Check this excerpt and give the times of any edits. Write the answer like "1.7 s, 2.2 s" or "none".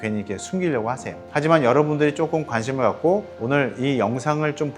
1.2 s